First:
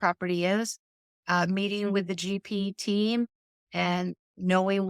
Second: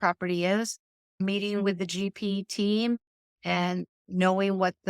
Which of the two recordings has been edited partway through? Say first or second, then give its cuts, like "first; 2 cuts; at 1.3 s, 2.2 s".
second; 1 cut; at 1.2 s